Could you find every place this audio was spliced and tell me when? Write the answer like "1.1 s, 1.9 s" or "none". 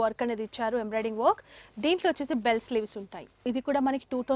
3.4 s